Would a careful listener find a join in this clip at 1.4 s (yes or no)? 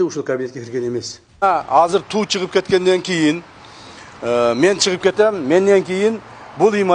yes